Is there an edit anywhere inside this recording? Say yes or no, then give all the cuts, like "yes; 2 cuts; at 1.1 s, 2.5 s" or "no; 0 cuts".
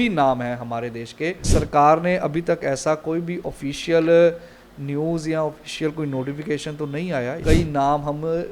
yes; 2 cuts; at 1.4 s, 7.4 s